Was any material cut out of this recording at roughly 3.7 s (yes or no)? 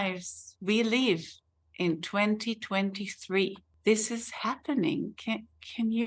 yes